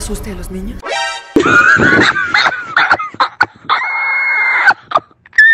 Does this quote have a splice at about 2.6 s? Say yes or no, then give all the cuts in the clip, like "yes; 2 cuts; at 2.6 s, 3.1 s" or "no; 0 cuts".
no; 1 cut; at 1.0 s